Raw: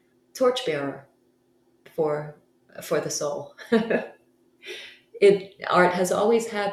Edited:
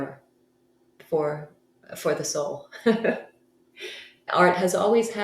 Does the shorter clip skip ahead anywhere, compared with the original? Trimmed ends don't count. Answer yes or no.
yes